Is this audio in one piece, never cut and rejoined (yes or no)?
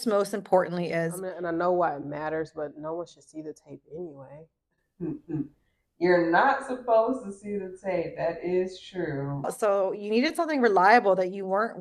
no